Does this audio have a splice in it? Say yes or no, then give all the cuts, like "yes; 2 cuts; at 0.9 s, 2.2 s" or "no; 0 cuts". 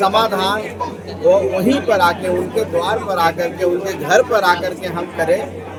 no; 0 cuts